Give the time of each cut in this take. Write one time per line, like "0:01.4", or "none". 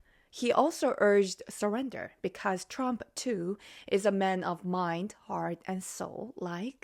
none

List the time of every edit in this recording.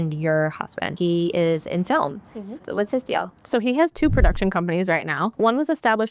0:00.9
0:02.6
0:05.3

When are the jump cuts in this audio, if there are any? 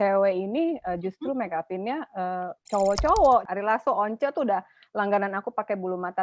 0:02.6
0:03.5

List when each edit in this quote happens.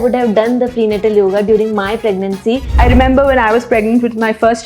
0:02.7

